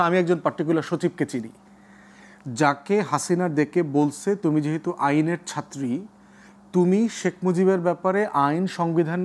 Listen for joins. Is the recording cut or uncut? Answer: uncut